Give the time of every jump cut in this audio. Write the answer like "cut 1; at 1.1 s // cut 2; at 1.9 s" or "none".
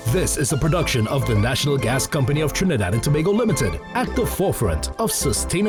none